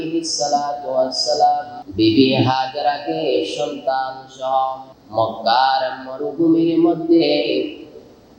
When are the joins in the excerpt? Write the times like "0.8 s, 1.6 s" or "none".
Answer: 1.8 s, 4.9 s